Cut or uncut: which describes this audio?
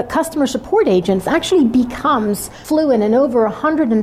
cut